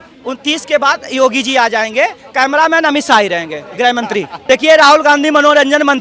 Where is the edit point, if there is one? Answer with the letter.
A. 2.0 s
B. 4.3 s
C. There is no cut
B